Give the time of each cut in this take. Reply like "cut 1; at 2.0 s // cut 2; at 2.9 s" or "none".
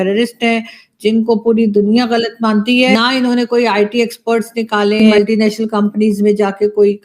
cut 1; at 2.9 s // cut 2; at 5.0 s